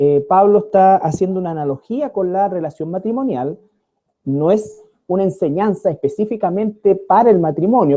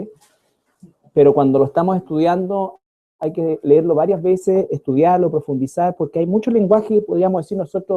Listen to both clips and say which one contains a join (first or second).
first